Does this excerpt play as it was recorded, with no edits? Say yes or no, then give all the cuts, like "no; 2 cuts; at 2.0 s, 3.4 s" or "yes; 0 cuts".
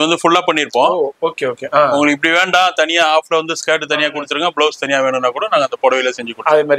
yes; 0 cuts